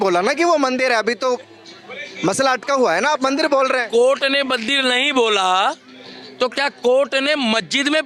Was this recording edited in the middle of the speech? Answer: no; 0 cuts

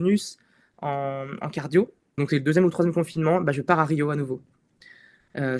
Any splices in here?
yes; 1 cut; at 2.2 s

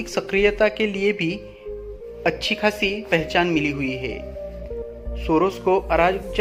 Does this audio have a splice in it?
no; 0 cuts

